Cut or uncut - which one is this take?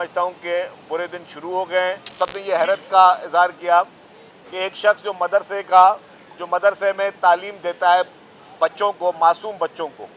cut